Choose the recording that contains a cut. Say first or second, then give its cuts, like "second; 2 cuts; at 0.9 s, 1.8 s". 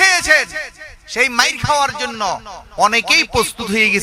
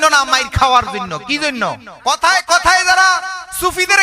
second; 1 cut; at 1.9 s